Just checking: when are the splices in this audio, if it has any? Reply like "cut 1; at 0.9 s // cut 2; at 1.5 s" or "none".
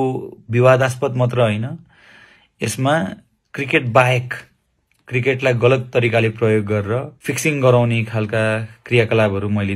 cut 1; at 7.2 s